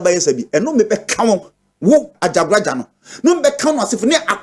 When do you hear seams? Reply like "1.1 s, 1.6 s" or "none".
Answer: 2.2 s